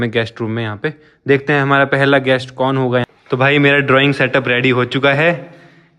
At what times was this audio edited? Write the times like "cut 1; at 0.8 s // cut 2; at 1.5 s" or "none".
cut 1; at 3.1 s

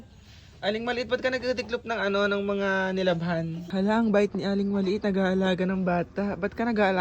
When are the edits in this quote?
cut 1; at 3.6 s

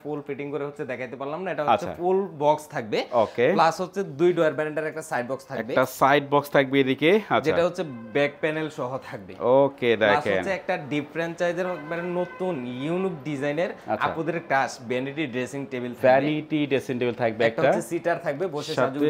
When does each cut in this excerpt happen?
none

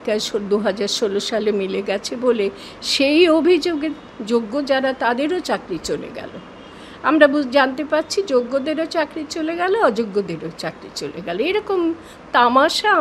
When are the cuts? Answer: none

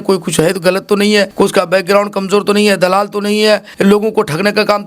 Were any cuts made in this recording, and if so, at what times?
cut 1; at 1.3 s // cut 2; at 3.7 s

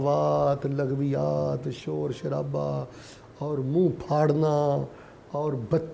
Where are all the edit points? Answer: none

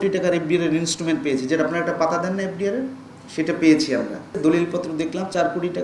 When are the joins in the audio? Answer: cut 1; at 4.3 s

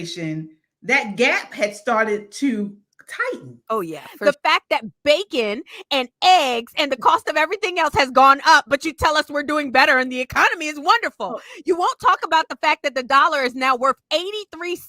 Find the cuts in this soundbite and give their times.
cut 1; at 4.2 s

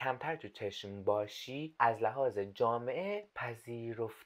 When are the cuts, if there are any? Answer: cut 1; at 1.6 s // cut 2; at 3.3 s

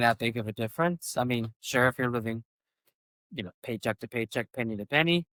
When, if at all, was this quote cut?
none

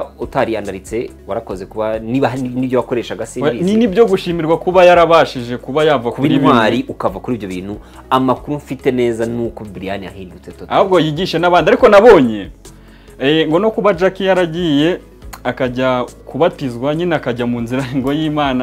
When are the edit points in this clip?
none

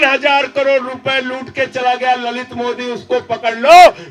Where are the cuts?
none

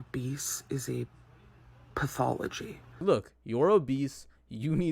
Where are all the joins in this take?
cut 1; at 3.0 s

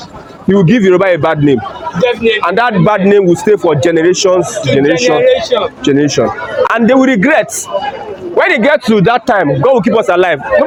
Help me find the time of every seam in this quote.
none

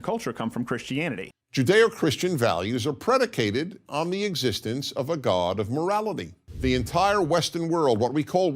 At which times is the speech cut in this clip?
cut 1; at 1.2 s

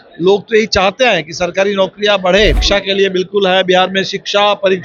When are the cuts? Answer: cut 1; at 2.6 s

